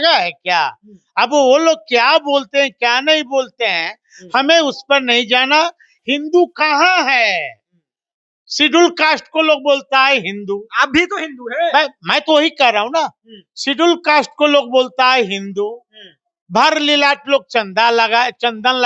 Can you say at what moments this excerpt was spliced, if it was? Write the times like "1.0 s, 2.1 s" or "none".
5.9 s

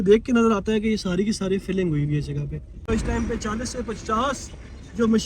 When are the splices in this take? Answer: 2.8 s

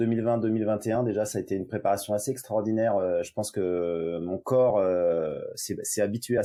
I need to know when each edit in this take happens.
none

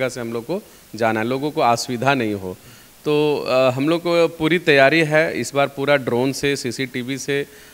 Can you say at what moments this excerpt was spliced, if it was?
none

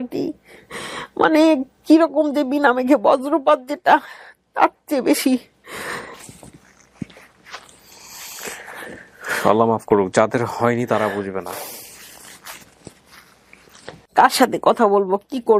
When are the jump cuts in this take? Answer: none

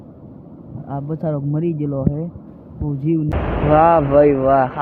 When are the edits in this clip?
3.3 s

